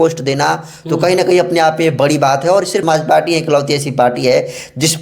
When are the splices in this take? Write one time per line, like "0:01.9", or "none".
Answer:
0:02.8